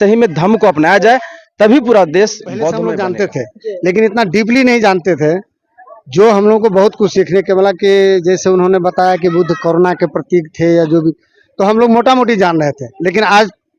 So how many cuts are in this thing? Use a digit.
1